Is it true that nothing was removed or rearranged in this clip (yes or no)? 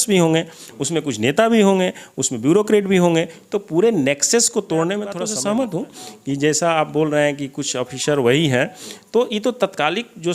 no